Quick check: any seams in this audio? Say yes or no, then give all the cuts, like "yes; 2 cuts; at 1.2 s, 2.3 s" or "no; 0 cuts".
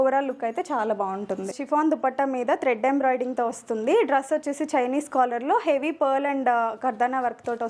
yes; 1 cut; at 1.5 s